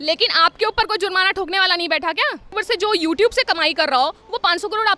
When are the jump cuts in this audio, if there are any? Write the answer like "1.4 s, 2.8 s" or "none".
2.6 s